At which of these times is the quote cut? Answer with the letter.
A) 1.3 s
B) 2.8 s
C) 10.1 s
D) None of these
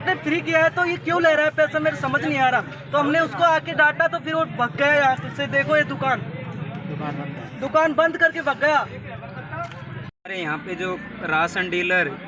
C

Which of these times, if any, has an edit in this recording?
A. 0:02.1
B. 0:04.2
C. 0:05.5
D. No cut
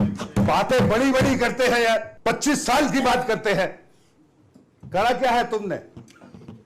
A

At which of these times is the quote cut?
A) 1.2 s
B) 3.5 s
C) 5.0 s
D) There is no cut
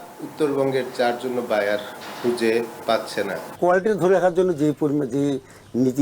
B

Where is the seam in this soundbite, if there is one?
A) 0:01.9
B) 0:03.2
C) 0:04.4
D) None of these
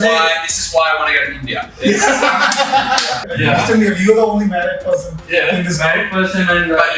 B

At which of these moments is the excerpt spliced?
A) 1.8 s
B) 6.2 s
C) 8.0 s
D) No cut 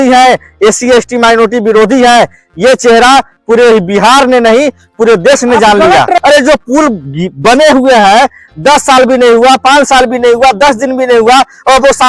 B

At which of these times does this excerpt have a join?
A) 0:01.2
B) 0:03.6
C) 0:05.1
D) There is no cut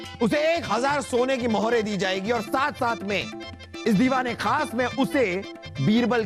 D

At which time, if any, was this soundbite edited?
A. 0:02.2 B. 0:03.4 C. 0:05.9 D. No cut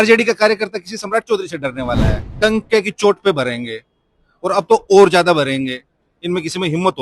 A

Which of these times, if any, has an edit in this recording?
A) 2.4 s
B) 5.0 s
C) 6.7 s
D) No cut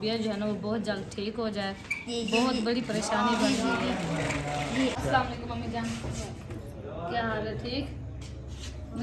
B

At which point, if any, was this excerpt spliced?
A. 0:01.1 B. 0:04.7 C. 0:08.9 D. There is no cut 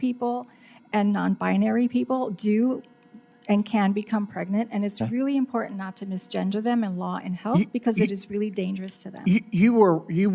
D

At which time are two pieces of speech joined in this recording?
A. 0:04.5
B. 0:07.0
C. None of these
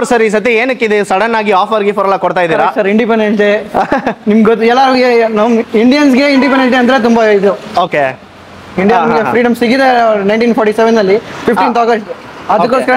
C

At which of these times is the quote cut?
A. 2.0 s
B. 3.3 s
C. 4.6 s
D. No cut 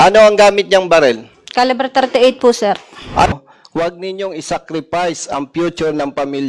B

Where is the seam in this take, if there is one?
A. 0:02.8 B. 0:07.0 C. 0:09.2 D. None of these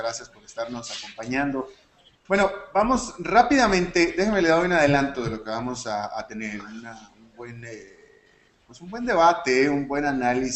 D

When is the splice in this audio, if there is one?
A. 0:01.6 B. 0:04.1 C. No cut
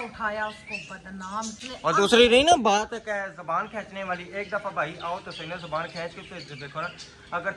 A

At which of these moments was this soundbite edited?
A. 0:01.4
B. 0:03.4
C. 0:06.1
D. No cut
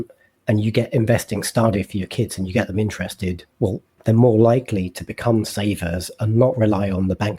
B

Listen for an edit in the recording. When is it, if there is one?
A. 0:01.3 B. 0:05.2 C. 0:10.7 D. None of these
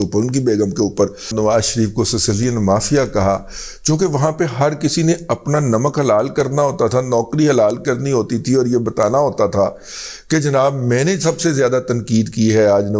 A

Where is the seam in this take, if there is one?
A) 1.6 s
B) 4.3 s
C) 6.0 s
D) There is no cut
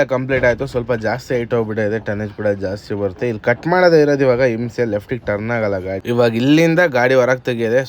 C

